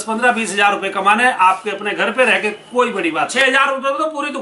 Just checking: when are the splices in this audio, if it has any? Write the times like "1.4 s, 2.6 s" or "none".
3.3 s

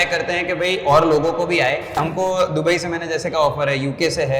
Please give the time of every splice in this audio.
2.0 s

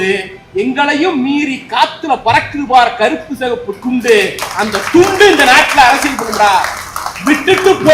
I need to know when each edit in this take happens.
none

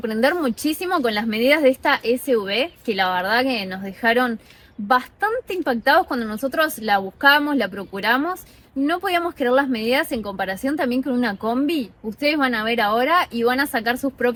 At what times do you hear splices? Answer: none

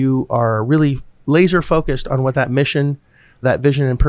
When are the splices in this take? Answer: 1.1 s

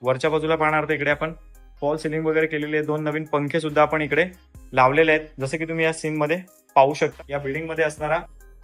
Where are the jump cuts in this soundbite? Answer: 7.1 s

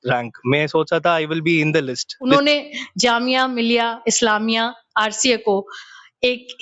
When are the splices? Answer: 2.3 s

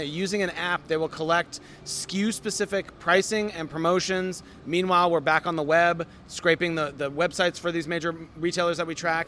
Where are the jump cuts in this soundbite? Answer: none

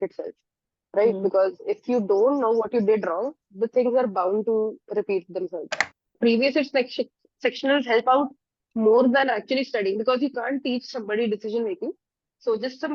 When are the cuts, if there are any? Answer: 6.1 s

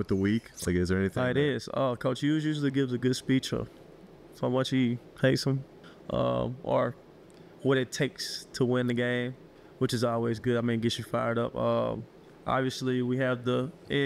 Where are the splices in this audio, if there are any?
none

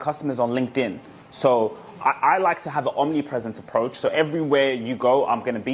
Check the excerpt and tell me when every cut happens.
none

